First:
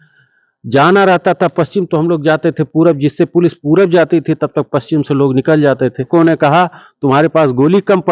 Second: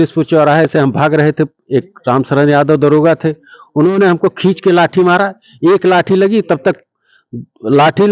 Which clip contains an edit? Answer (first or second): first